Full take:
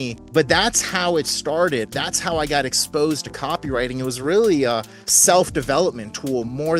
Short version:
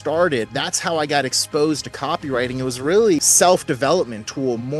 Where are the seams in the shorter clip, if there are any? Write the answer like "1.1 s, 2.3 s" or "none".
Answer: 3.2 s